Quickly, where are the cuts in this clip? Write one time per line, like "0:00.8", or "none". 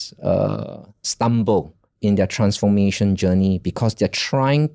none